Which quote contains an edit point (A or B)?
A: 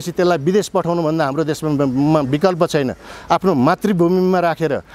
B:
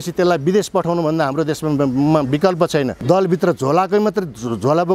B